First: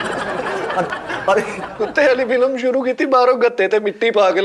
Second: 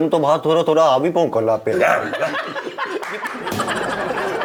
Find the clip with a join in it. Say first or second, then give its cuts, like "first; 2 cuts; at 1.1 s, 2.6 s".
first; 1 cut; at 1.7 s